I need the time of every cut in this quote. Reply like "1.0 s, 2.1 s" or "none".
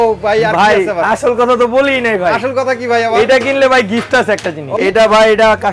4.8 s